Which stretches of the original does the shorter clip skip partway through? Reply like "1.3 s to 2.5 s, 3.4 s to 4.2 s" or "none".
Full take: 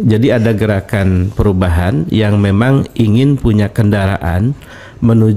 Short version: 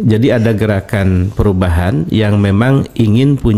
none